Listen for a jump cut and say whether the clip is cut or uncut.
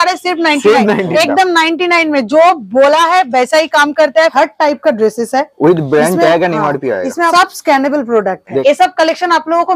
cut